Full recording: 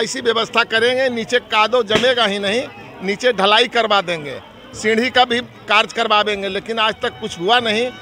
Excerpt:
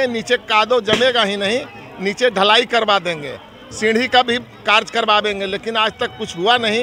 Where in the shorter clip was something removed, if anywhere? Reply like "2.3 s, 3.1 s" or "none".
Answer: none

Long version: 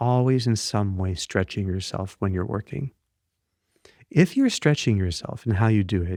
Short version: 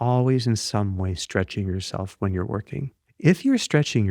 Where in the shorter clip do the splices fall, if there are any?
3.0 s

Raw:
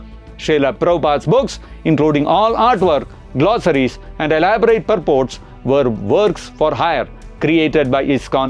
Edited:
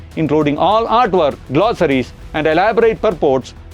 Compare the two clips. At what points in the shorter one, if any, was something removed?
1.4 s

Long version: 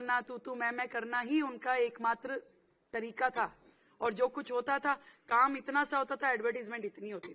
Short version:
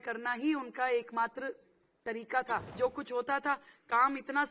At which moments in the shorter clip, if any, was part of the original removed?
2.8 s

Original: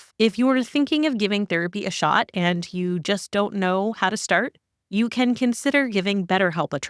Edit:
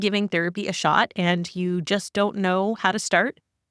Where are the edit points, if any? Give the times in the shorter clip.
none

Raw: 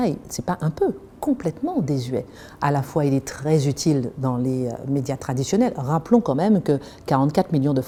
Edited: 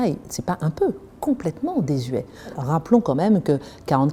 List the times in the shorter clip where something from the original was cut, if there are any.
2.6 s

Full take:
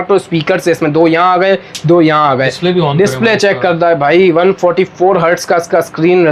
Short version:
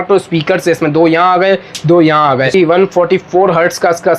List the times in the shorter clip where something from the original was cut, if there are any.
2.5 s

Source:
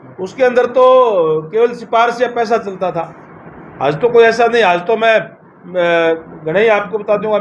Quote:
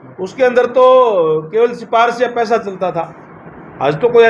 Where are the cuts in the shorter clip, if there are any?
none

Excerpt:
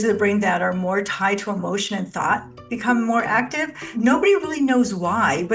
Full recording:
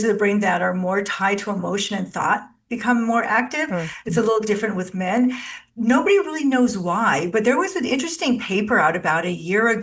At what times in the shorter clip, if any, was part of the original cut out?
3.7 s

